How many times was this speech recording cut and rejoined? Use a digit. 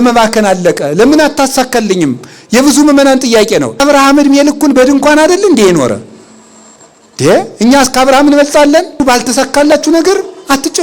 2